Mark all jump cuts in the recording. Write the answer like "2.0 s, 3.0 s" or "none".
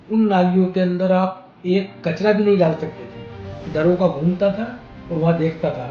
none